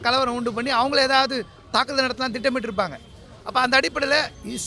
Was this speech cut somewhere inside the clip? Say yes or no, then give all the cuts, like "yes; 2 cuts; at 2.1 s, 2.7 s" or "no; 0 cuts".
no; 0 cuts